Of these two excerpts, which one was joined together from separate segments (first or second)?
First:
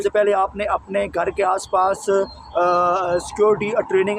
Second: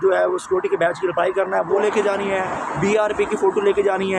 second